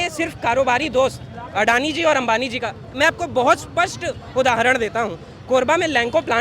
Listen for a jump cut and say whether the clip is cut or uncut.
uncut